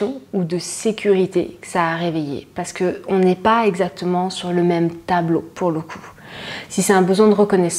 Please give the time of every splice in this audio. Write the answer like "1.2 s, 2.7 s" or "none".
none